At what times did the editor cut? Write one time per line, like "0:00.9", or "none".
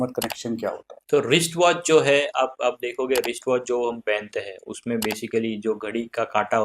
0:00.9